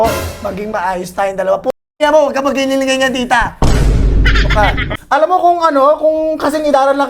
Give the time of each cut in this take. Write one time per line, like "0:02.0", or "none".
0:04.9